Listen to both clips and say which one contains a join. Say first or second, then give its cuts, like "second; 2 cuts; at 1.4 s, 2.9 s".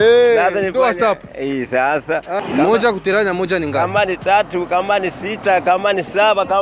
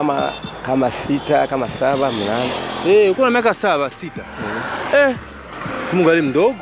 first; 1 cut; at 2.4 s